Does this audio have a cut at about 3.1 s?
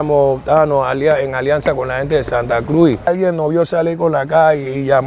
yes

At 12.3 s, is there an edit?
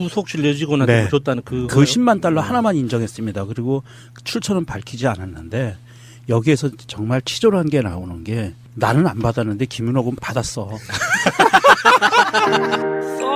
yes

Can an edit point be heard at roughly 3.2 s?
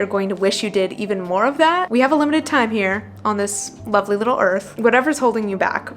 no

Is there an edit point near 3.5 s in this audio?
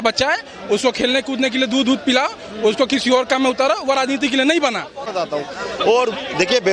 no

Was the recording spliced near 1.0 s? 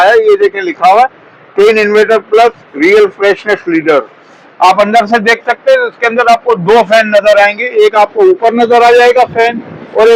no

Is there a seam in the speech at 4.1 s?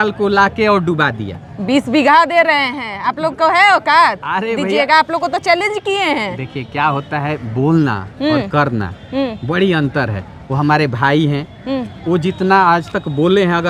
no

